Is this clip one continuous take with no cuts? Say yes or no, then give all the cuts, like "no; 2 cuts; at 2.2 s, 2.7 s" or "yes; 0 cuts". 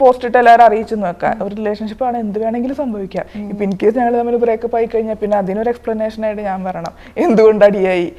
yes; 0 cuts